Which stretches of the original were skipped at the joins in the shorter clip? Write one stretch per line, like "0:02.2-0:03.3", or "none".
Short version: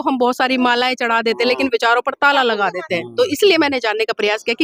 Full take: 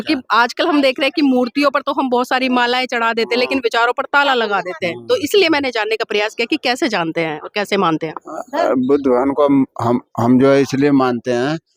none